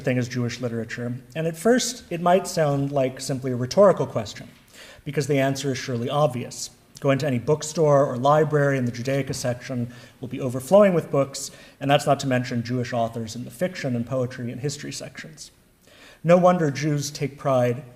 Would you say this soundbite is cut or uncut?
uncut